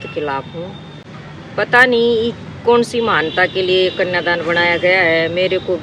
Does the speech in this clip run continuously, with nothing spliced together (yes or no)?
yes